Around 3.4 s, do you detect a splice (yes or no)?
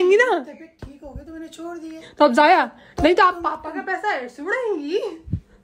no